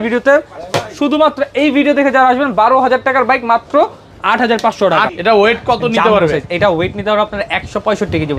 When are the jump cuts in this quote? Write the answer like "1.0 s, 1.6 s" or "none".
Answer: 5.1 s